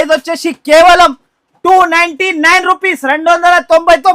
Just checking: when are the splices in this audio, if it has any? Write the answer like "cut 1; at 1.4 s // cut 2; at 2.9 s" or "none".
none